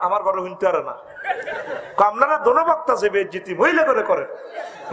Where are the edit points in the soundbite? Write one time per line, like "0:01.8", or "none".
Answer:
none